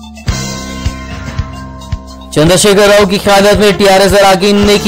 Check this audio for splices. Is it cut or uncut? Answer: cut